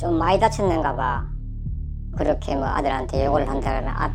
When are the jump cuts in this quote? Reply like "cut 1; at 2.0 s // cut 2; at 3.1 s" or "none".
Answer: none

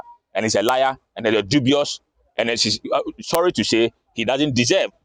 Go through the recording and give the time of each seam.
none

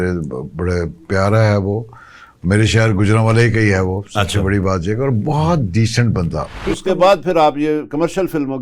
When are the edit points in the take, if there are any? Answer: cut 1; at 6.7 s

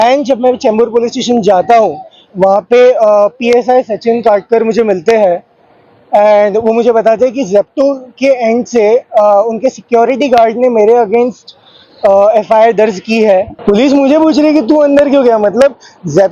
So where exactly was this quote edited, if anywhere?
cut 1; at 13.5 s

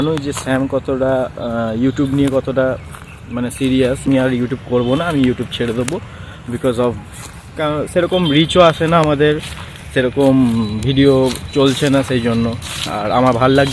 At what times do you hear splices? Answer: cut 1; at 4.1 s

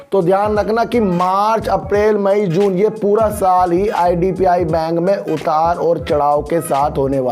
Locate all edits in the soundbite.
none

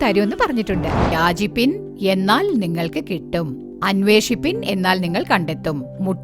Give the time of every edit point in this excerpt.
cut 1; at 1.1 s

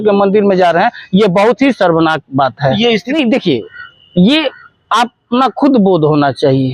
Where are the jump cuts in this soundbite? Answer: cut 1; at 3.1 s

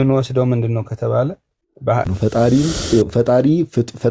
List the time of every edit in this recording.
cut 1; at 2.1 s

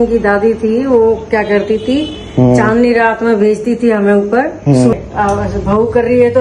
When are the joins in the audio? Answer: cut 1; at 4.9 s

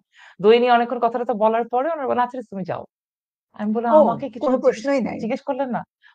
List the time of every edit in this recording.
none

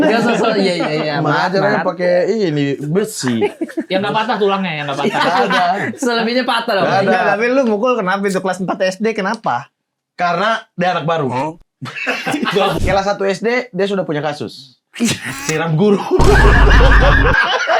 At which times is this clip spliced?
cut 1; at 12.8 s

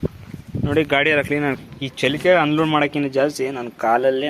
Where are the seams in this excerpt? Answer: cut 1; at 1.6 s

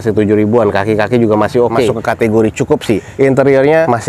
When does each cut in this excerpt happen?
cut 1; at 2.0 s

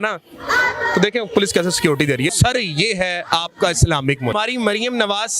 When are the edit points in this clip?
cut 1; at 2.3 s // cut 2; at 4.3 s

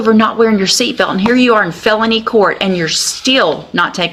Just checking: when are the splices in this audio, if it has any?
none

